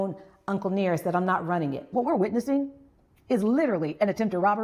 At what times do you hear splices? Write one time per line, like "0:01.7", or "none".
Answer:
0:01.8